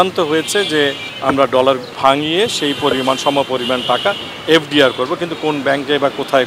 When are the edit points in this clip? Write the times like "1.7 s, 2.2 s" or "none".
1.1 s, 1.9 s